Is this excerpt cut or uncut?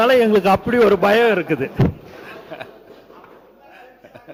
uncut